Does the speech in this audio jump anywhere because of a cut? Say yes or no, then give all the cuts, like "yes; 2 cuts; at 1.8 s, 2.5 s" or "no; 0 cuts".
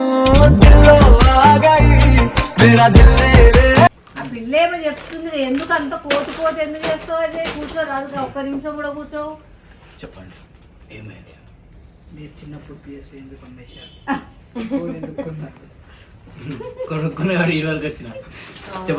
no; 0 cuts